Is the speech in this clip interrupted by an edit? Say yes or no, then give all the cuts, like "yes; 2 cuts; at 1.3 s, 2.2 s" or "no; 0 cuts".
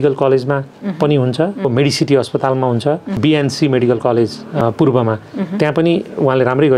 yes; 3 cuts; at 1.7 s, 3.1 s, 4.6 s